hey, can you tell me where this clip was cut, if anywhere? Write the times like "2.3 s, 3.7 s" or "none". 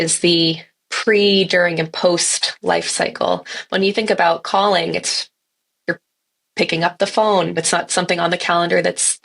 7.6 s